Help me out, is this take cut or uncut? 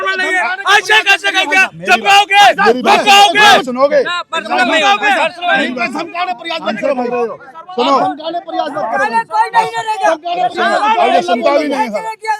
uncut